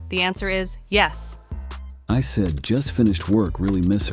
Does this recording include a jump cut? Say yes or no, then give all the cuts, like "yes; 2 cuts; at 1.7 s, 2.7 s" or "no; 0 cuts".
yes; 1 cut; at 1.8 s